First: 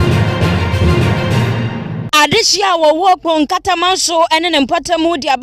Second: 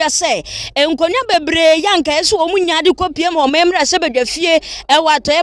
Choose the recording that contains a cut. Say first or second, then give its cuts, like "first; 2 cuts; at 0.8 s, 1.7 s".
first; 1 cut; at 2.0 s